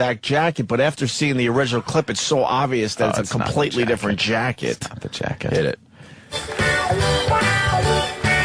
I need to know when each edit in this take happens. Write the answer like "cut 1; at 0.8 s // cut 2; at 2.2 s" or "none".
cut 1; at 3.8 s